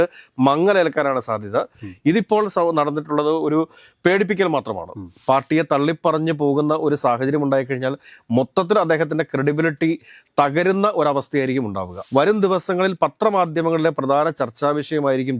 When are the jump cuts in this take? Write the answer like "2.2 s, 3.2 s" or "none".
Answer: 5.2 s, 12.0 s